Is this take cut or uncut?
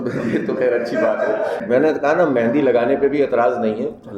cut